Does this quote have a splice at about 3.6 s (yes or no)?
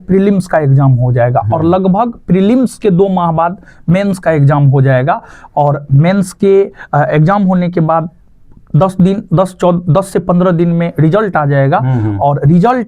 no